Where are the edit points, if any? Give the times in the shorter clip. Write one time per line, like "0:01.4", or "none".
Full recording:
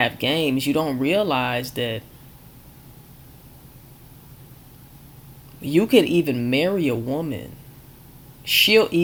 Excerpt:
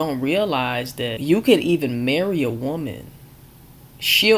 0:01.2